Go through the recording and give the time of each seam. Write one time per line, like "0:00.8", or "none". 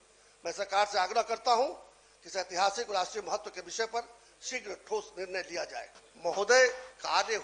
0:06.0